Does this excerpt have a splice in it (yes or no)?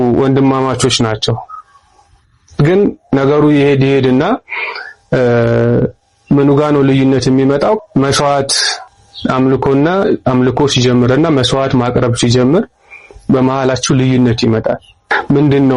no